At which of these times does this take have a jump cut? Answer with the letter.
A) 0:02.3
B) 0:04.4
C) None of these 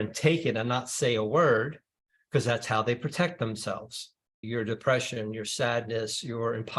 B